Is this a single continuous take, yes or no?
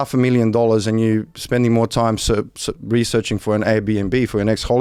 yes